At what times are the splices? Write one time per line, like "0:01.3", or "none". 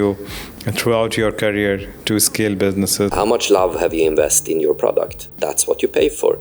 0:03.1